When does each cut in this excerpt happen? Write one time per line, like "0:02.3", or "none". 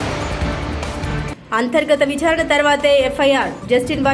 0:01.2